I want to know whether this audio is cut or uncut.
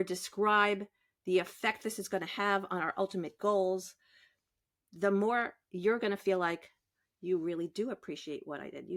uncut